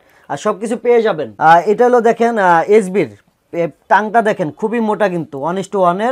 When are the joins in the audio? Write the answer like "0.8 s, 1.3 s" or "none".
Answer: 1.3 s